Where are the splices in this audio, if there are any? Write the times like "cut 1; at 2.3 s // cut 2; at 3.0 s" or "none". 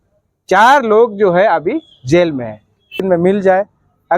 cut 1; at 3.0 s